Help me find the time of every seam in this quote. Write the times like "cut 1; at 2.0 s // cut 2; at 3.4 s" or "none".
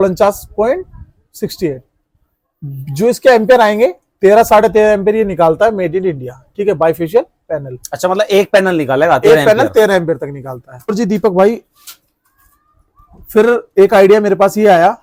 none

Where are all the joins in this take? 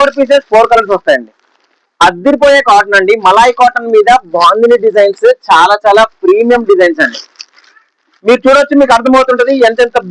none

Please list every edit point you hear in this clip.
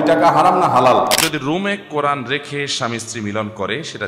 cut 1; at 1.2 s

